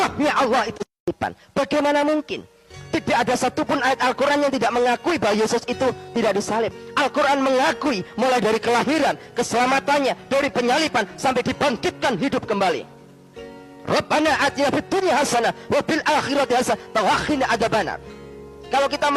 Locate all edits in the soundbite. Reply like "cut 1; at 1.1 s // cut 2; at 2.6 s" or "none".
cut 1; at 1.0 s

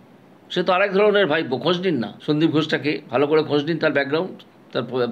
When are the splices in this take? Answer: cut 1; at 2.1 s

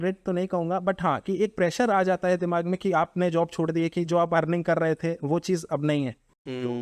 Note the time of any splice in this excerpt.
none

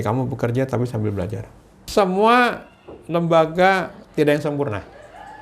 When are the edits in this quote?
cut 1; at 1.8 s

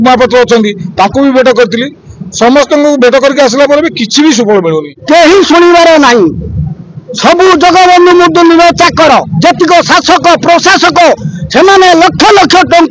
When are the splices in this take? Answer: cut 1; at 4.9 s

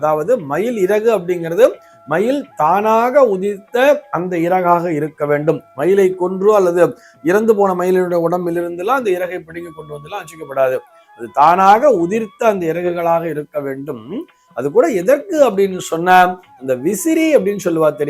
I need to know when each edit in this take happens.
none

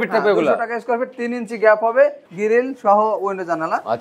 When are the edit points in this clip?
cut 1; at 2.3 s

